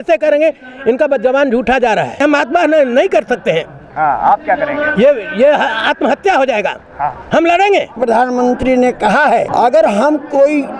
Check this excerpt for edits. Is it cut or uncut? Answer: cut